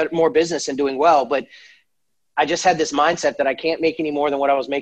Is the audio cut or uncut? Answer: uncut